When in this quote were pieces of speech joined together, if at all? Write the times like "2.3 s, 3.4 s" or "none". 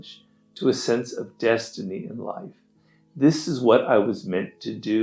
none